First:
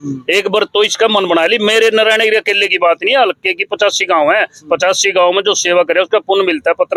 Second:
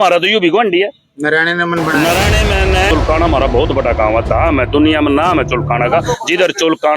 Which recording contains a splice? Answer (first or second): second